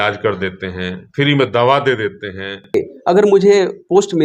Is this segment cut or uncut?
cut